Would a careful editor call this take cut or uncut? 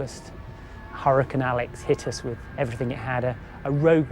cut